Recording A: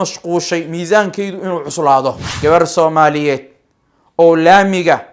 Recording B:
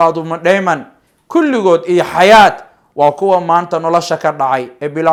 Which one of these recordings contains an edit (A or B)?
A